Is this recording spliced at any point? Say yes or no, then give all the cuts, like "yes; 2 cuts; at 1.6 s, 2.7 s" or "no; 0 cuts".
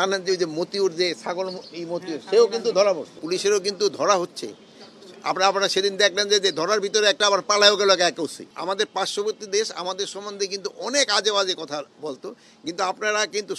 yes; 2 cuts; at 3.2 s, 8.4 s